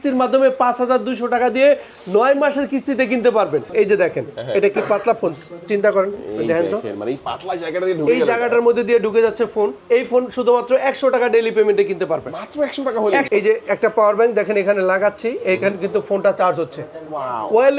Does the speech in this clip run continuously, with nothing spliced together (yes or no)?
no